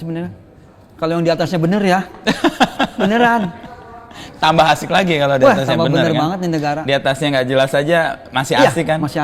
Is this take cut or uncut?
uncut